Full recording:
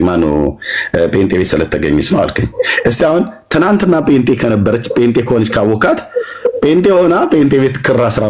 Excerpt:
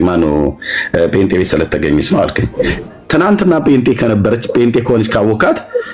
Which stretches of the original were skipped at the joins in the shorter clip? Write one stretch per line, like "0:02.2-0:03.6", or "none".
0:02.8-0:03.2